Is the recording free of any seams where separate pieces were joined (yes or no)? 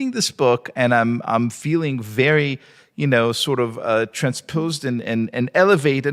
yes